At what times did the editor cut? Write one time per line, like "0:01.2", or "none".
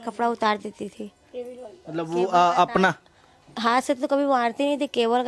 none